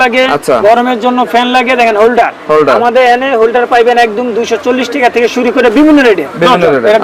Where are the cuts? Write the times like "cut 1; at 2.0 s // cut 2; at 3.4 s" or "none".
none